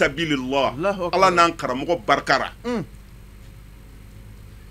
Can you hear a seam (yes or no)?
no